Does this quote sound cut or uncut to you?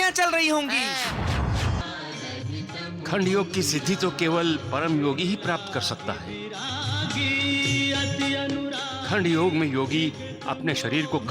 cut